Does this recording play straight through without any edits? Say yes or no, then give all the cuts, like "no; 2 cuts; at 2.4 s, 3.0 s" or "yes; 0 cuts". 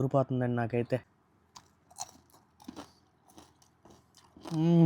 no; 1 cut; at 1.0 s